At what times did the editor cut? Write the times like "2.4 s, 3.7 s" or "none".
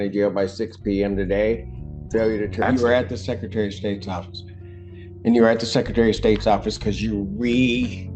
2.6 s

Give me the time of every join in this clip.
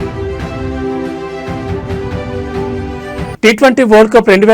3.3 s

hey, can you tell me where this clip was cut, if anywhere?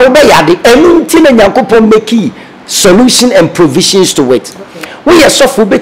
4.8 s

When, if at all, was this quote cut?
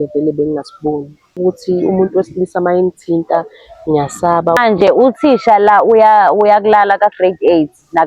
1.4 s, 4.6 s

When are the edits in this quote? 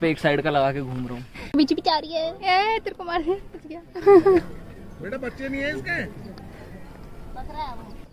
1.3 s

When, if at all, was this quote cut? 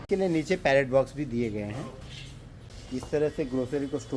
2.8 s

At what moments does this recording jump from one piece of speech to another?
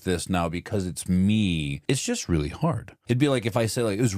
1.8 s, 2.9 s

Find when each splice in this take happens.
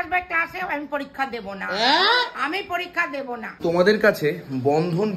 3.6 s

